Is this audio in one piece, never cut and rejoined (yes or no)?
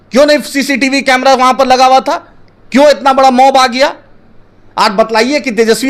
yes